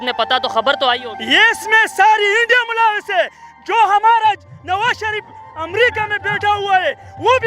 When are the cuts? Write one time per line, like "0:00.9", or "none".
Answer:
none